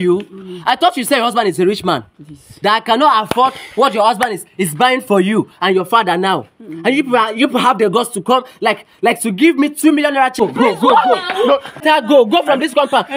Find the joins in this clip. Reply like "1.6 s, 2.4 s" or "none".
10.4 s, 11.8 s